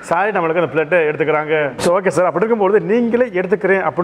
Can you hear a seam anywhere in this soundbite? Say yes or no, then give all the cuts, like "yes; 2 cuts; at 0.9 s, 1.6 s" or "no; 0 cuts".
yes; 1 cut; at 1.8 s